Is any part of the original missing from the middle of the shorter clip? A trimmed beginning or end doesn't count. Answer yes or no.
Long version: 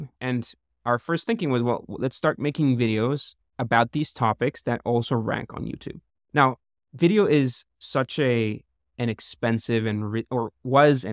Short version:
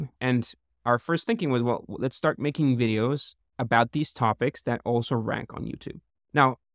no